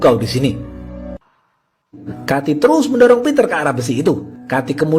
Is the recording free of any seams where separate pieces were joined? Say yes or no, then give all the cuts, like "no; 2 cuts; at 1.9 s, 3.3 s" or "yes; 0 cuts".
no; 1 cut; at 2.1 s